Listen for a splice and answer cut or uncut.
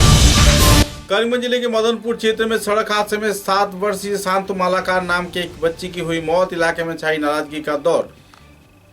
cut